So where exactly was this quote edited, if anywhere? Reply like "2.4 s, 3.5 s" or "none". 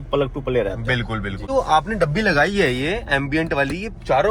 1.5 s